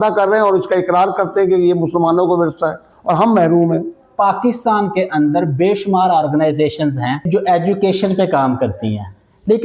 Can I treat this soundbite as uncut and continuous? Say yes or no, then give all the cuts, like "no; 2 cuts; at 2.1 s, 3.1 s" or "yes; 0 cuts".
no; 2 cuts; at 4.1 s, 7.2 s